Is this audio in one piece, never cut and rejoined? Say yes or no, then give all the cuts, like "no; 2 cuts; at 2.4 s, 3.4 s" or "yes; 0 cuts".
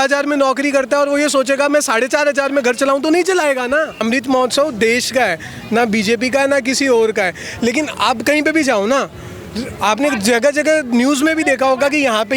no; 1 cut; at 4.0 s